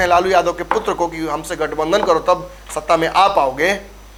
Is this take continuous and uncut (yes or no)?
yes